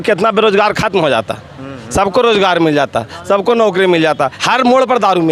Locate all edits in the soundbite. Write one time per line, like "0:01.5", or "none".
0:04.4